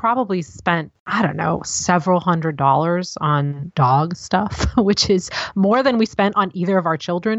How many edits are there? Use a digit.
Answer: 2